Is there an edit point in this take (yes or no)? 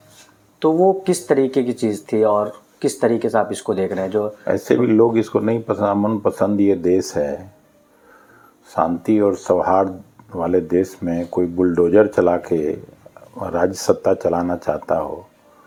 no